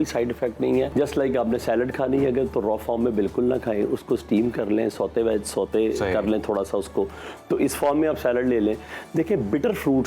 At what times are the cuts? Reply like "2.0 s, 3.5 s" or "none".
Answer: 0.9 s

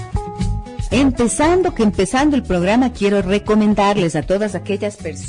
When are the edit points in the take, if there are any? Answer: 1.8 s

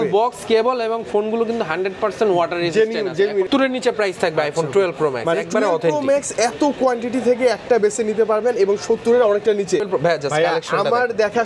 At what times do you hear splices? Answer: 3.5 s, 9.9 s

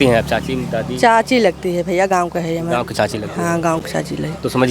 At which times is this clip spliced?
none

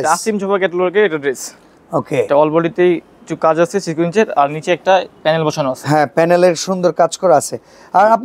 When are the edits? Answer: none

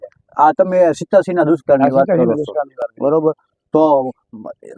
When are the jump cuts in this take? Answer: none

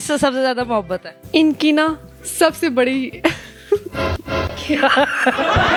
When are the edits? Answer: none

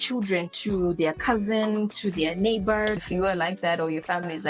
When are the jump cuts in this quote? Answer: 3.1 s

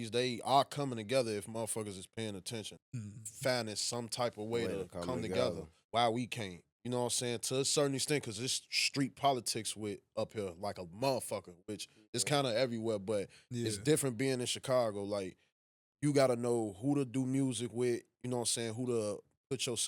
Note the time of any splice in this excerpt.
2.7 s, 5.7 s

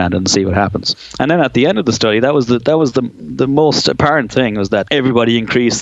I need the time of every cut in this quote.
1.0 s, 4.9 s

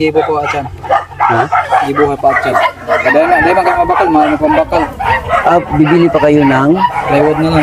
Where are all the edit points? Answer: none

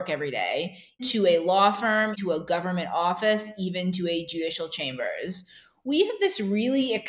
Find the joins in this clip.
1.1 s, 2.2 s

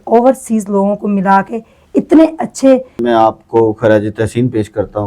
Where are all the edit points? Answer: 3.0 s

